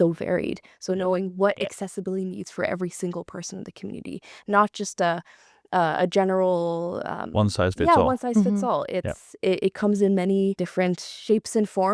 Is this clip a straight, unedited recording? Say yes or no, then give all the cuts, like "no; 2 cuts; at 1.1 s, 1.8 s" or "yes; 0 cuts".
yes; 0 cuts